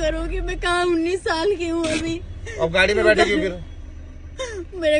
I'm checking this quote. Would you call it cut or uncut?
uncut